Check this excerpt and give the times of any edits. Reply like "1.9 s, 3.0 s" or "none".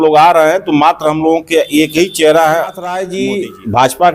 3.1 s